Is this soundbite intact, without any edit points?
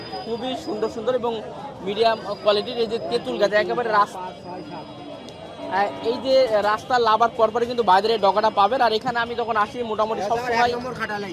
yes; 0 cuts

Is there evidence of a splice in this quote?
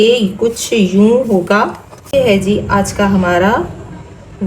yes; 1 cut; at 2.1 s

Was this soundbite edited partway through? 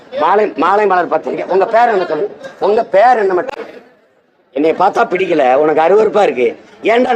yes; 1 cut; at 3.5 s

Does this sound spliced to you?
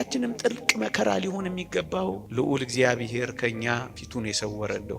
yes; 2 cuts; at 2.2 s, 4.0 s

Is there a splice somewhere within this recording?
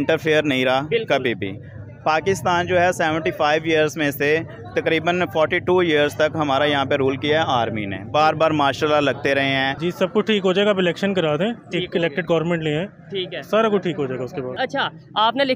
yes; 2 cuts; at 9.8 s, 14.5 s

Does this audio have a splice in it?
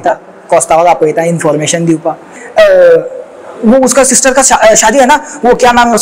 yes; 1 cut; at 2.4 s

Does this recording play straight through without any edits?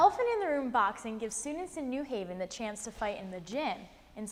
yes; 0 cuts

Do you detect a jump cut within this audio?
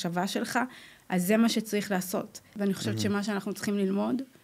yes; 1 cut; at 2.5 s

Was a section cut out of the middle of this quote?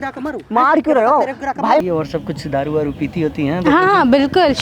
yes; 1 cut; at 1.8 s

